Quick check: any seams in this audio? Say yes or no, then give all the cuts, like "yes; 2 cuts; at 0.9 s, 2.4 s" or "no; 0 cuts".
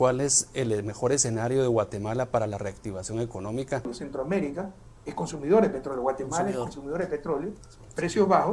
yes; 1 cut; at 4.0 s